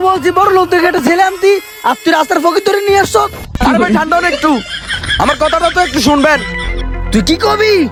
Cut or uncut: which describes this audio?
uncut